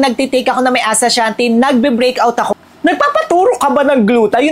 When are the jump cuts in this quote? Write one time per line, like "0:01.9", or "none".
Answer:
0:02.5